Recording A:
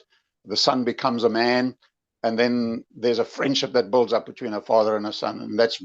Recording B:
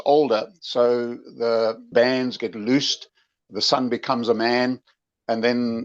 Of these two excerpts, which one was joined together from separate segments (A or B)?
B